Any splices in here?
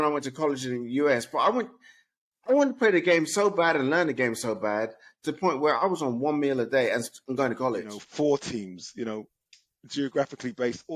yes; 1 cut; at 8.0 s

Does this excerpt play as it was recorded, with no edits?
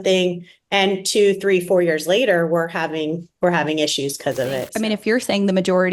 no; 1 cut; at 4.7 s

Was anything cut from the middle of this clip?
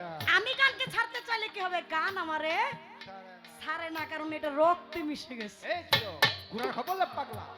no; 0 cuts

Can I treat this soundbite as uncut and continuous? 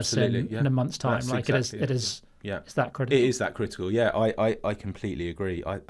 yes; 0 cuts

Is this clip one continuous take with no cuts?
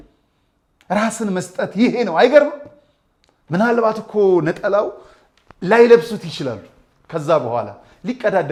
yes; 0 cuts

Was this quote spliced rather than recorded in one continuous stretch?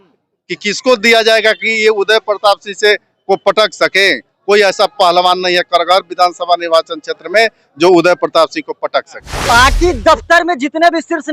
yes; 1 cut; at 9.3 s

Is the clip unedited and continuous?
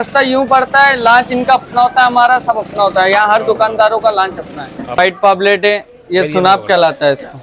no; 1 cut; at 5.0 s

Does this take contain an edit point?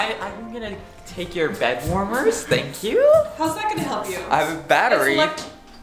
no; 0 cuts

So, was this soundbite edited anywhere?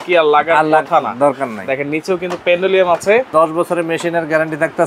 yes; 1 cut; at 3.3 s

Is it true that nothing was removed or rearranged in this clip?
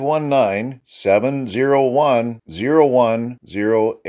yes; 0 cuts

